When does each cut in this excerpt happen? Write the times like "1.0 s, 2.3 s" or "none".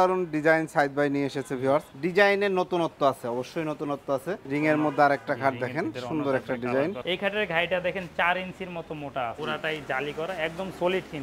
1.9 s, 4.4 s, 7.0 s, 9.4 s

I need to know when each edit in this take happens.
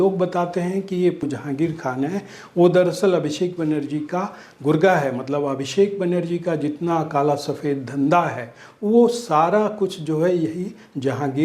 1.2 s

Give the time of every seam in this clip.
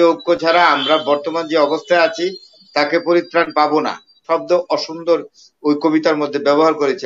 4.2 s

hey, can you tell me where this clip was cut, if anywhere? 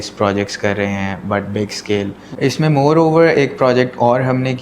2.3 s

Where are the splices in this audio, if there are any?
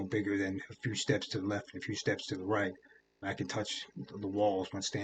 none

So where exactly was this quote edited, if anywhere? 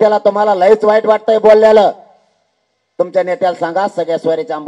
none

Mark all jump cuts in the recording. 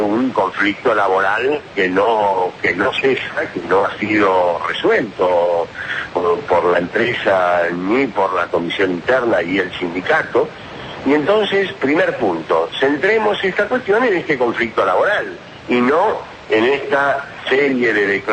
none

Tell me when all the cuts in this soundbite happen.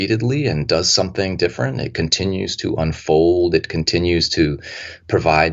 none

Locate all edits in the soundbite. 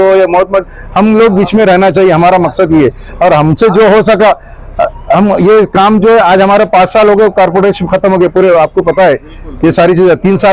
none

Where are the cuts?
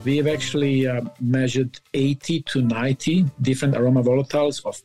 none

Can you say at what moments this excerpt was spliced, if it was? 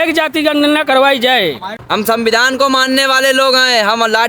1.7 s

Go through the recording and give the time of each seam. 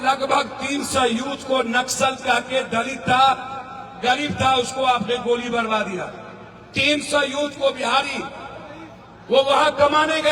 none

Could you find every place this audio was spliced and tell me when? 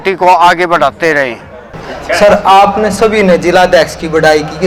none

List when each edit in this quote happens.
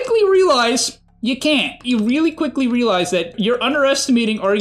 1.8 s, 3.4 s

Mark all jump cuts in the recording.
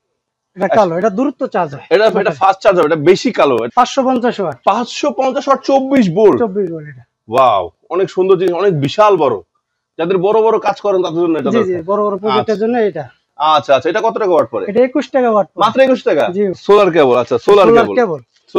4.0 s, 16.6 s

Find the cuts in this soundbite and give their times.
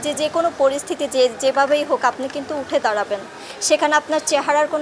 none

